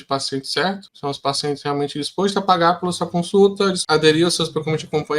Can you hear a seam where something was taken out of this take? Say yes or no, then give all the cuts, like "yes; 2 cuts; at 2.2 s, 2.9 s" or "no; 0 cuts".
yes; 1 cut; at 3.8 s